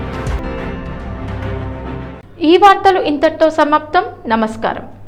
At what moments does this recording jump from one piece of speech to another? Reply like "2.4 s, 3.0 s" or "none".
none